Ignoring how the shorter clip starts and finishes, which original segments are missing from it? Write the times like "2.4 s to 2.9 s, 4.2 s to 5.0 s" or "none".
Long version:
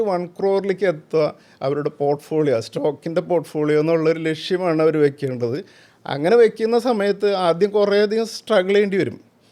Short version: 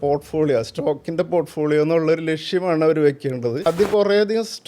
5.6 s to 7.5 s